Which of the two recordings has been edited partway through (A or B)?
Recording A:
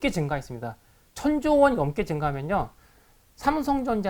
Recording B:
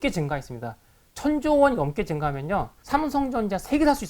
B